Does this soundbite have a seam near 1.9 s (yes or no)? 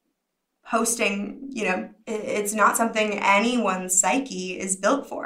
yes